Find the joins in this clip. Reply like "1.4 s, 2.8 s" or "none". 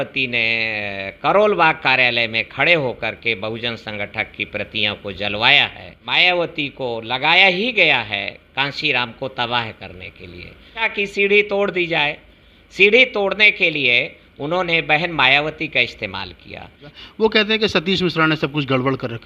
6.0 s, 10.9 s, 16.9 s